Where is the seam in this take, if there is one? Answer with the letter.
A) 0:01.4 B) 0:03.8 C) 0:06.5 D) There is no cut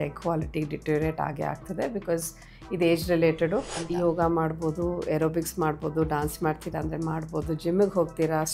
B